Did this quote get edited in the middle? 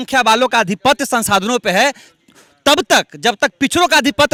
no; 0 cuts

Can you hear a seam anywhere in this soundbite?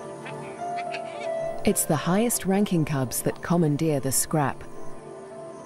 no; 0 cuts

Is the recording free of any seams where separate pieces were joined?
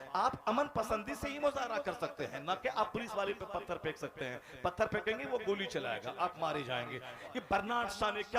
no; 1 cut; at 7.2 s

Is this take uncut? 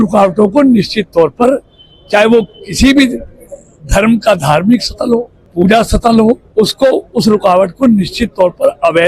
no; 2 cuts; at 5.4 s, 6.5 s

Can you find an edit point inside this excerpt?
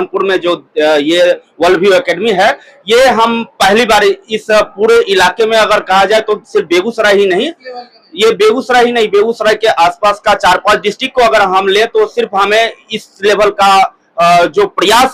no; 0 cuts

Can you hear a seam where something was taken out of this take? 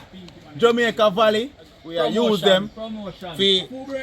yes; 1 cut; at 1.8 s

